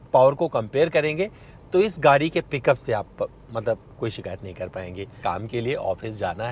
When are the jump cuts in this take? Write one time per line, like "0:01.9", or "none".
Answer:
0:05.1